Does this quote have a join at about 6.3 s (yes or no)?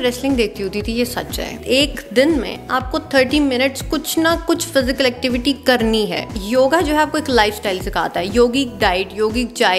yes